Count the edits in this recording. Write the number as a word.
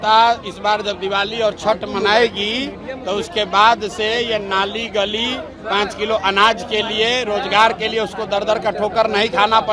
zero